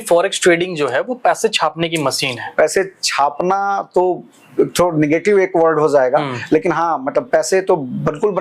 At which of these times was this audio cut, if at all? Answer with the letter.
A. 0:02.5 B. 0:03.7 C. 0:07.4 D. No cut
A